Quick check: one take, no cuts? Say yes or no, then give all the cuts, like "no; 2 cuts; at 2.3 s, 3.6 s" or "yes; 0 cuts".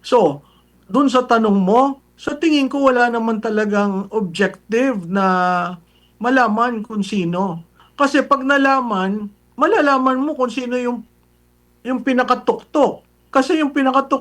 no; 1 cut; at 7.8 s